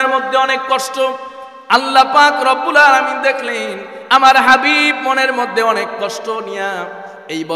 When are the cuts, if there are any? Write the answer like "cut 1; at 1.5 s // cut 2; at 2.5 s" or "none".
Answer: none